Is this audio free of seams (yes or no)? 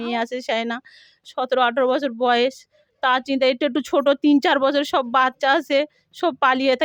yes